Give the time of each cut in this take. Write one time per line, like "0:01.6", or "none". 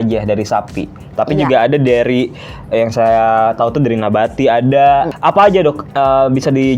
0:05.1

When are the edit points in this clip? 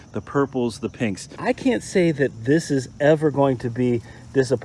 0:01.3

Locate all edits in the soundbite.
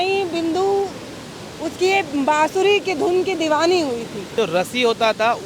0:04.3

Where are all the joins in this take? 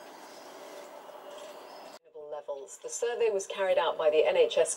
0:02.2

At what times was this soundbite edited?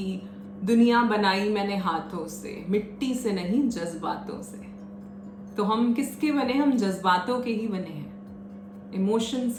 none

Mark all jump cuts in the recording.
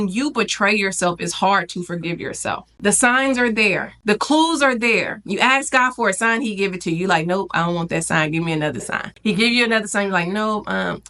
0:02.7
0:03.9
0:09.0

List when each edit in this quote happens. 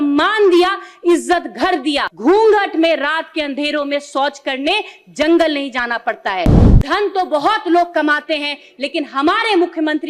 0:02.1
0:06.7

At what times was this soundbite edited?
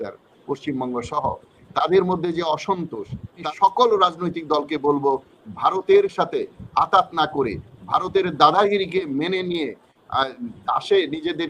0:03.3

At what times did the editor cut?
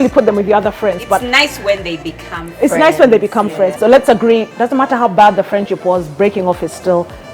0:03.7

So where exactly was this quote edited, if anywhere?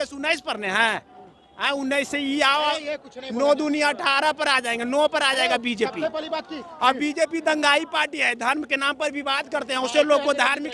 none

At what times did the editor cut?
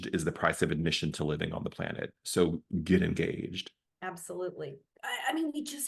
0:04.8

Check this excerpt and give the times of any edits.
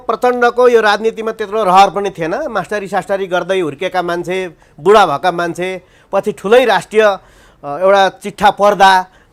none

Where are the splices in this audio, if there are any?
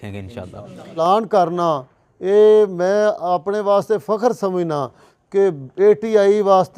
0:01.0

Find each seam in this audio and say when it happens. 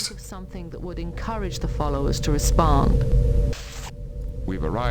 0:03.5

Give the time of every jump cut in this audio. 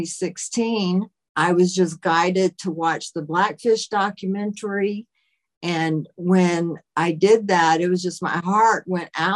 0:01.2

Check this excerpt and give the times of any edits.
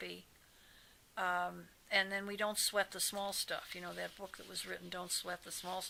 none

